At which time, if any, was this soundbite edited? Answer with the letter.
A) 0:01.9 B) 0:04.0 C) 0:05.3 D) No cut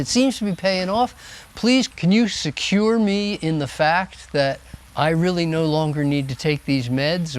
A